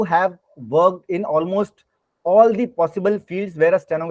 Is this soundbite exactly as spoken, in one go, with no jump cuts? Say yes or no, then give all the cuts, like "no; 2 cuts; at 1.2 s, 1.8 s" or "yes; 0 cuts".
yes; 0 cuts